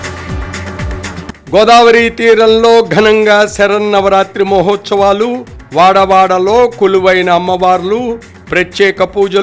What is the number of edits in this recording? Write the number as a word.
one